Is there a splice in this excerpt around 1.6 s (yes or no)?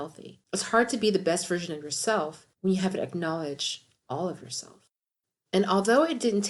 no